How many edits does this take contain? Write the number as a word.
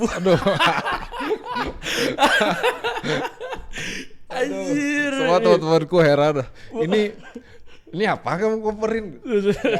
zero